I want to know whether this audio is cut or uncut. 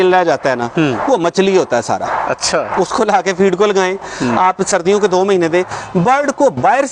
uncut